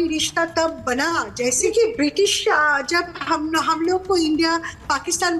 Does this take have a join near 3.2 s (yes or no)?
no